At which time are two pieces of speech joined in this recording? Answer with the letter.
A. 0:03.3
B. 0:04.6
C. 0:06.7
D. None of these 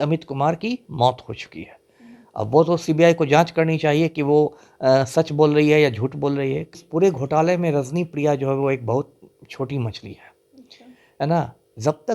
C